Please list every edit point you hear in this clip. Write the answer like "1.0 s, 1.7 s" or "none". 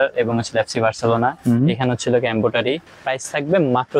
3.0 s